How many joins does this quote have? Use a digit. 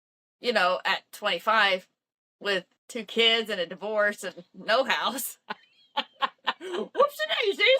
1